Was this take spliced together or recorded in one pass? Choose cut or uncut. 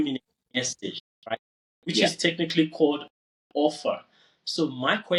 uncut